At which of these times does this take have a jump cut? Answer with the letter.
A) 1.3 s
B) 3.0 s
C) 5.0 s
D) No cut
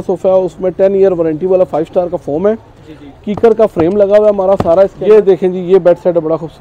C